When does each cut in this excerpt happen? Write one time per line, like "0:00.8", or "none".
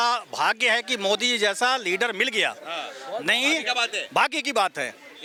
none